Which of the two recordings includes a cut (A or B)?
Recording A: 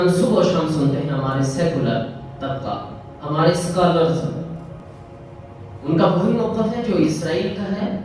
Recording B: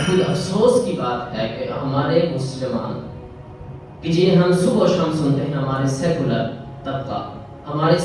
A